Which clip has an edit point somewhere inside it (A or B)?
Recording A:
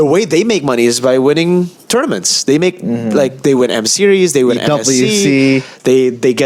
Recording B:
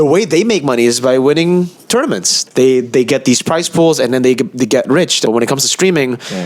B